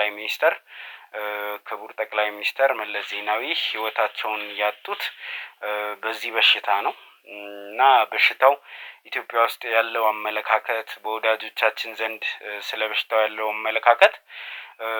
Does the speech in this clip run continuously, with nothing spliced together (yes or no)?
yes